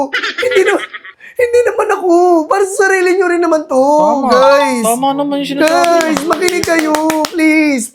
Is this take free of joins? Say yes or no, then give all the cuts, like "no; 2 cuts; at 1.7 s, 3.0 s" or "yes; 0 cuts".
yes; 0 cuts